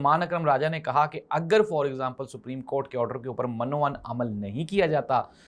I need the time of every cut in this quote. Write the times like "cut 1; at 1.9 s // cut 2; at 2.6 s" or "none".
none